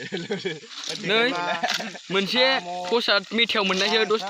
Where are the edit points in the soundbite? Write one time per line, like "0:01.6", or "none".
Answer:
none